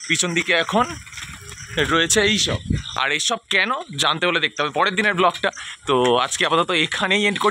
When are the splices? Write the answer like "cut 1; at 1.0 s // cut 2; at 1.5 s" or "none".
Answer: none